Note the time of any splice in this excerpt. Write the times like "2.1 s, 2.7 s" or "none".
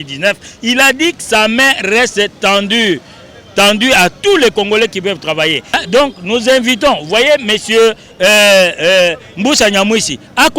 5.8 s